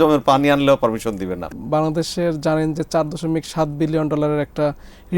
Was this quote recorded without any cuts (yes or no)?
no